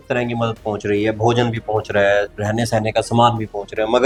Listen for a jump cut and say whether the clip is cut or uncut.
uncut